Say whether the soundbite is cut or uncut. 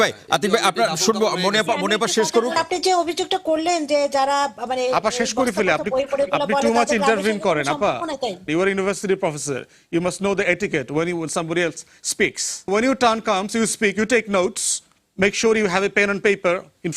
cut